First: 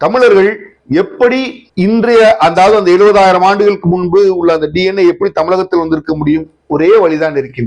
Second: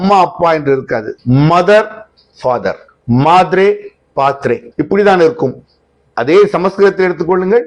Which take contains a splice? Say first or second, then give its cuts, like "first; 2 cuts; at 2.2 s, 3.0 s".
second; 3 cuts; at 1.1 s, 2.9 s, 4.7 s